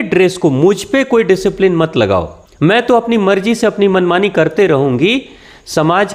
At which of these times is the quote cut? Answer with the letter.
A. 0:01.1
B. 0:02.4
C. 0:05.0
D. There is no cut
B